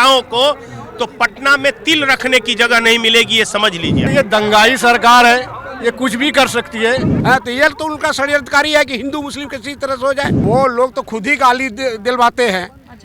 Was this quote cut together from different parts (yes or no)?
yes